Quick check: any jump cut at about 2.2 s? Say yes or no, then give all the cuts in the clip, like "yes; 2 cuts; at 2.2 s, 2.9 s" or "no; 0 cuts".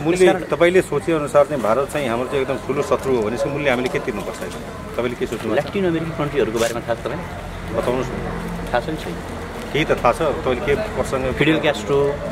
no; 0 cuts